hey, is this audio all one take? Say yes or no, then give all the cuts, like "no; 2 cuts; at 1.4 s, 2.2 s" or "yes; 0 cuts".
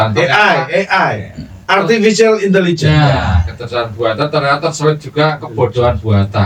yes; 0 cuts